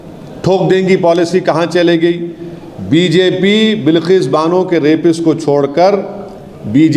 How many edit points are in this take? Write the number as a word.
zero